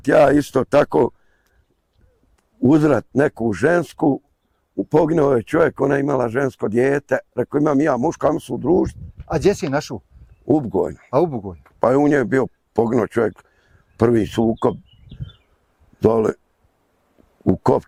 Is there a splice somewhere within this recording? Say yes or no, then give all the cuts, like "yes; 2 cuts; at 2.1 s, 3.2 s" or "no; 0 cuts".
no; 0 cuts